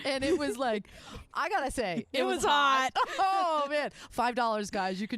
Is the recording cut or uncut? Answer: cut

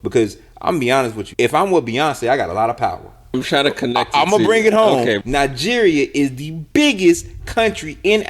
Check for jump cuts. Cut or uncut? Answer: cut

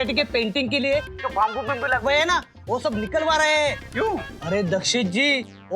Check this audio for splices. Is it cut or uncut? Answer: cut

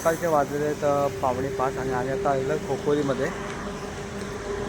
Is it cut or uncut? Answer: uncut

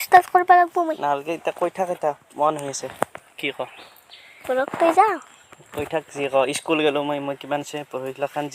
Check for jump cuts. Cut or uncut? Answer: uncut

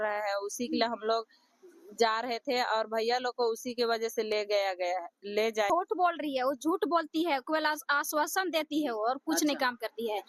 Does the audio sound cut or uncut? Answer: cut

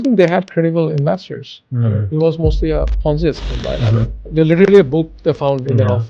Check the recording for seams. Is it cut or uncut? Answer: cut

